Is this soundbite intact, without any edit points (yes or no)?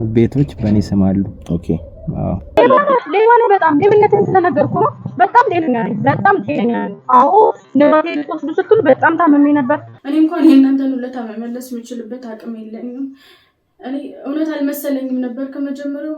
no